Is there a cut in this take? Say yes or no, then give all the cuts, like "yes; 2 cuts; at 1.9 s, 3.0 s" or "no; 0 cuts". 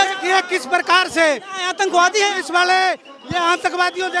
no; 0 cuts